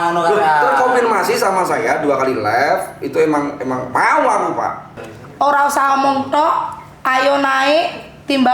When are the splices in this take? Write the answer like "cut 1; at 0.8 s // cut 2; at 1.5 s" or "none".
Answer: cut 1; at 4.9 s